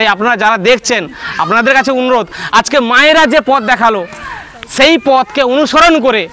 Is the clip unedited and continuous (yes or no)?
yes